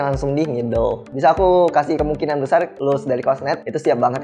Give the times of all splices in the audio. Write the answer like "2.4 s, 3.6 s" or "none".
1.0 s